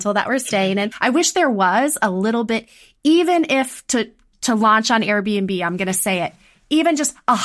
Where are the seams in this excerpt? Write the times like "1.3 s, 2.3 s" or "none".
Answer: 1.0 s